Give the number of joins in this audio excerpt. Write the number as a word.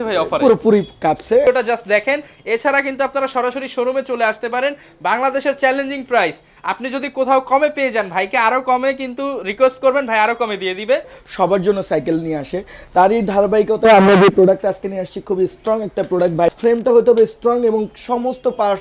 three